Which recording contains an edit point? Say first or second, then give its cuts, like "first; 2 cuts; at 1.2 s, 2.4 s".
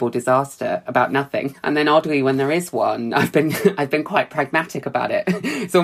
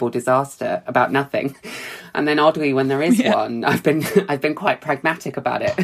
first; 1 cut; at 1.6 s